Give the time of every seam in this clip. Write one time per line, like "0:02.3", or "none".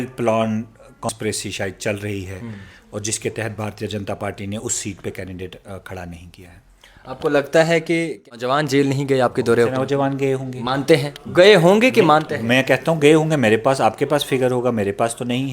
0:01.1
0:08.3